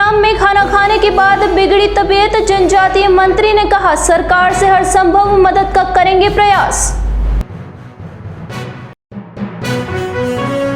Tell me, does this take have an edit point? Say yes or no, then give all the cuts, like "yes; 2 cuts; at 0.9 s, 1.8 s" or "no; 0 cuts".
no; 0 cuts